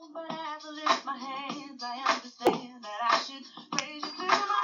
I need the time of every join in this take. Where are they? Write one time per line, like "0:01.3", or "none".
0:02.5